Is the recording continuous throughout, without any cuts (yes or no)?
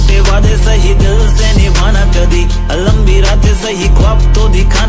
yes